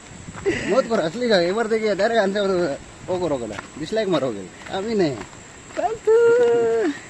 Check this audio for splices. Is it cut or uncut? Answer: uncut